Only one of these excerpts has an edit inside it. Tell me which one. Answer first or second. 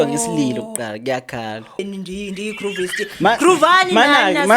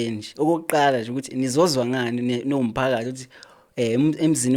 first